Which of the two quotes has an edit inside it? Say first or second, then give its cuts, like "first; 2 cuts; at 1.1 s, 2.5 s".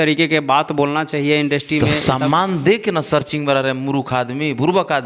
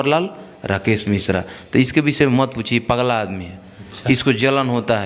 first; 1 cut; at 1.9 s